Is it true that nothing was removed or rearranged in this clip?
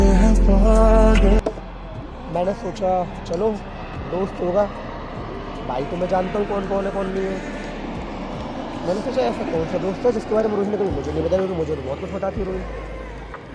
yes; 0 cuts

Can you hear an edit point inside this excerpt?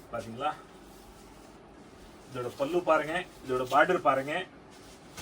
no; 0 cuts

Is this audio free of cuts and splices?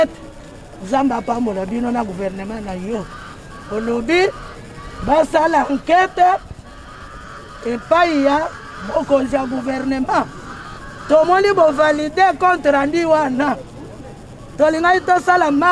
yes; 0 cuts

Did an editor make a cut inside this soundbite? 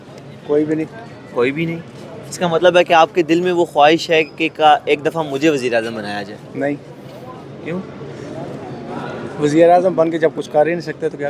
no; 0 cuts

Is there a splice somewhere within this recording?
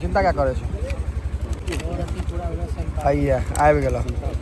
yes; 1 cut; at 1.6 s

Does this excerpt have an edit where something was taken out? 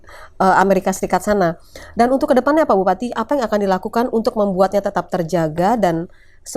no; 0 cuts

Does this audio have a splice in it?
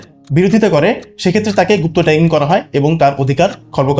no; 0 cuts

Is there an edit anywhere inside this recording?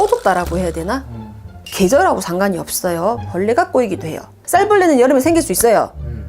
yes; 2 cuts; at 1.6 s, 4.4 s

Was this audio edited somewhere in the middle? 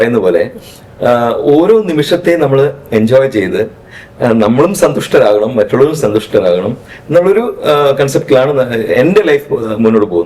no; 0 cuts

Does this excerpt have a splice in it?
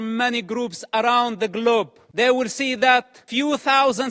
yes; 2 cuts; at 2.0 s, 3.2 s

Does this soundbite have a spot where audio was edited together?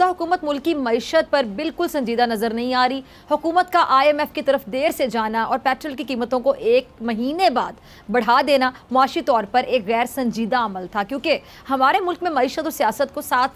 no; 0 cuts

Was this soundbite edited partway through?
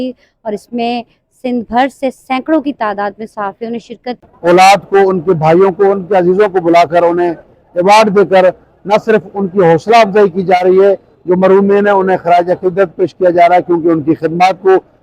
yes; 1 cut; at 4.3 s

